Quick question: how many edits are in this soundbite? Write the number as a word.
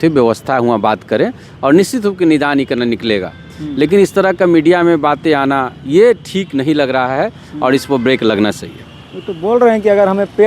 zero